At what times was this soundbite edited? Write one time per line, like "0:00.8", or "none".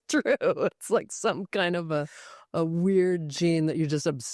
none